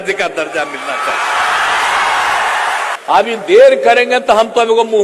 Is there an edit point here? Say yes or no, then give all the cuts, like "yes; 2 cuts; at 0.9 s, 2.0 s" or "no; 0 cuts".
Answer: yes; 1 cut; at 2.9 s